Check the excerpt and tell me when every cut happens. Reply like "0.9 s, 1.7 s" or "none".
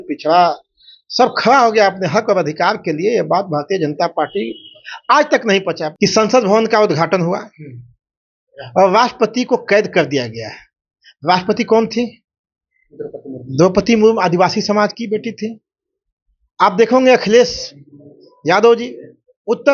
5.9 s